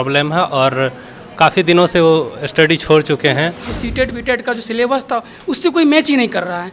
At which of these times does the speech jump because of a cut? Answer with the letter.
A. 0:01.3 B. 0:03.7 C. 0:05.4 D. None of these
B